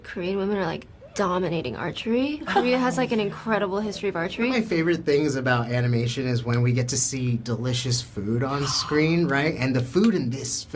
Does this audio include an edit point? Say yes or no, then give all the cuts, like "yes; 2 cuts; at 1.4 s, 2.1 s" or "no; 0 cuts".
yes; 2 cuts; at 2.5 s, 4.5 s